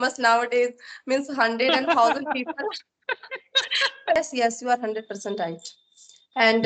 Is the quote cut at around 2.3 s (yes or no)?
no